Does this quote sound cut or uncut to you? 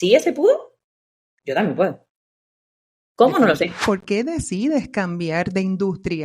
cut